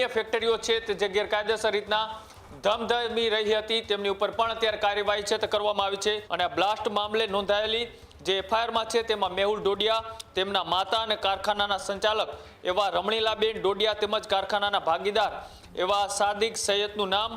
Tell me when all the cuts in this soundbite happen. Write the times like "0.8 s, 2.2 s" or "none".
6.2 s